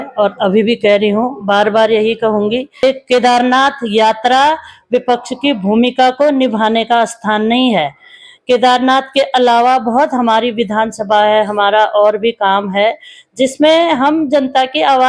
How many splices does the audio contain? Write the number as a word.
one